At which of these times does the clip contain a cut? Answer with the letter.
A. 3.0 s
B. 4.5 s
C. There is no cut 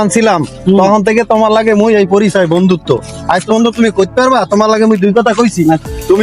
C